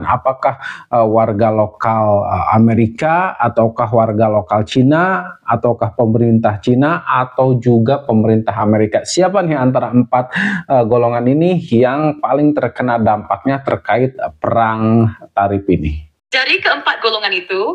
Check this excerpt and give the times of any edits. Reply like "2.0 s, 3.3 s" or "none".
none